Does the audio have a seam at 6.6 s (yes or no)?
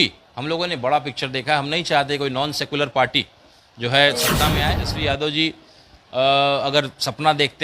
no